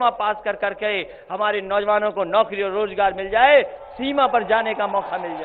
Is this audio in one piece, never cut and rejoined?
yes; 0 cuts

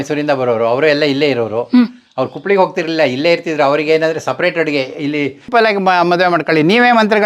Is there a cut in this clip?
yes; 1 cut; at 5.5 s

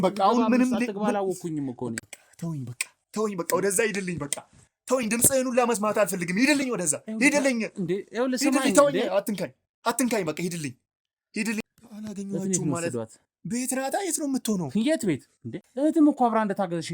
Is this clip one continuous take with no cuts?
no; 3 cuts; at 2.0 s, 11.6 s, 15.6 s

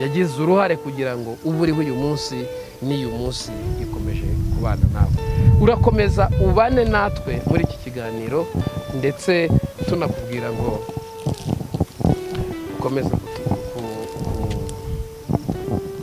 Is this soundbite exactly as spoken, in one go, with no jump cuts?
yes; 0 cuts

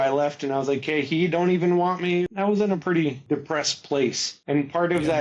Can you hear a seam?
yes; 3 cuts; at 2.3 s, 3.2 s, 4.3 s

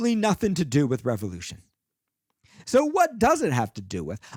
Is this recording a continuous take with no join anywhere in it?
yes; 0 cuts

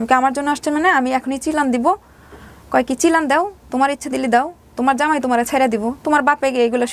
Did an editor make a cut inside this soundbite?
no; 0 cuts

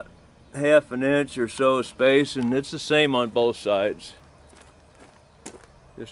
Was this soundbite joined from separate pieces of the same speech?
yes; 1 cut; at 4.2 s

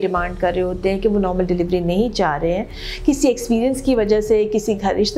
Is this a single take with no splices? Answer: yes; 0 cuts

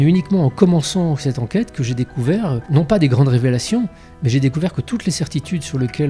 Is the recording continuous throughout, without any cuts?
no; 1 cut; at 2.6 s

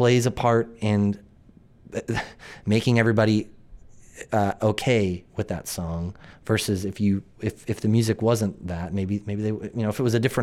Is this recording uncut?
yes; 0 cuts

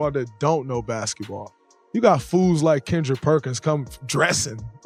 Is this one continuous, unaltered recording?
yes; 0 cuts

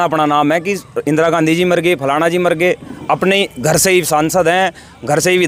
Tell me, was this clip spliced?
no; 0 cuts

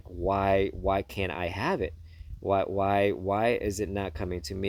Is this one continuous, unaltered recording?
yes; 0 cuts

